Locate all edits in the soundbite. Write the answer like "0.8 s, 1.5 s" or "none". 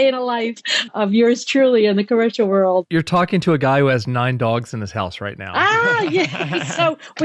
none